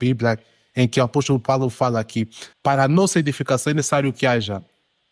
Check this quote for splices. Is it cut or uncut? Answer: cut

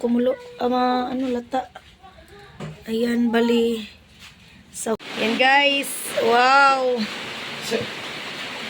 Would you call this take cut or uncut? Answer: cut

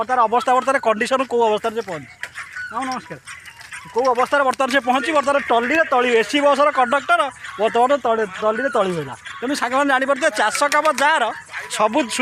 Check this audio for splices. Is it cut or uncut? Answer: uncut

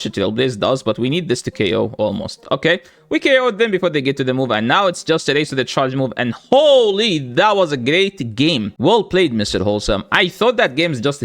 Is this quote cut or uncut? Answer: cut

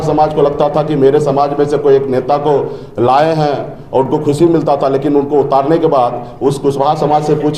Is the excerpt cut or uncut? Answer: uncut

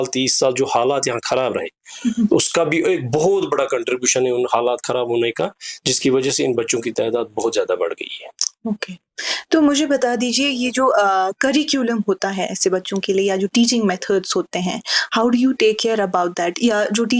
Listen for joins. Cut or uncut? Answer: uncut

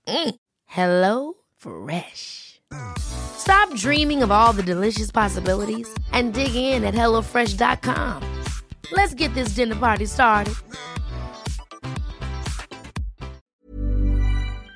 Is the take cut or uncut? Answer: cut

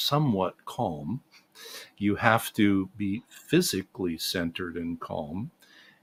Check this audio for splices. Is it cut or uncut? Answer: uncut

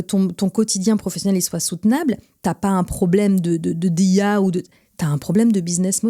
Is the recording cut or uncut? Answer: uncut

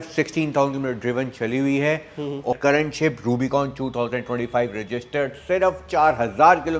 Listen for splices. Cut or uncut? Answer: cut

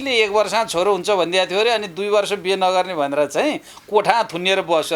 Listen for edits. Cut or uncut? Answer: uncut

